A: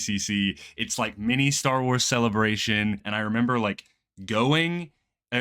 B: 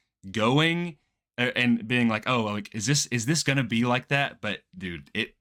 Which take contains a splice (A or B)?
A